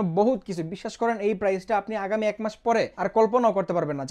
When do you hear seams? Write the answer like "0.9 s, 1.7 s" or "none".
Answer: 2.9 s